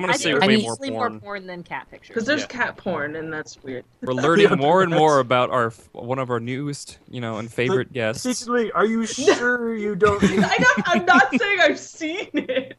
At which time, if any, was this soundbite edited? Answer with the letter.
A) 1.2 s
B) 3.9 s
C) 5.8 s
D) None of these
B